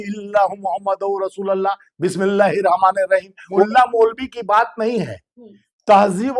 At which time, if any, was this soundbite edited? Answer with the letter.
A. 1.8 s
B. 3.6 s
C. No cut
B